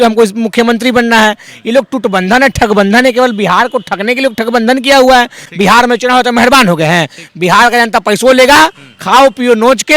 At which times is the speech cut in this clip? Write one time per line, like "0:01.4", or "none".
0:05.4